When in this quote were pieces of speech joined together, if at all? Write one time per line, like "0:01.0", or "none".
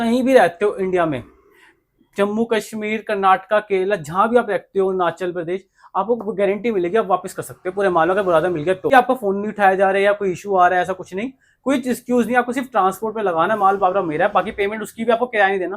0:08.9